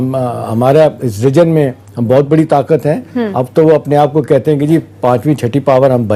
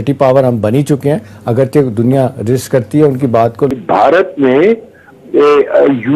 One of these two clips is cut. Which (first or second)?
second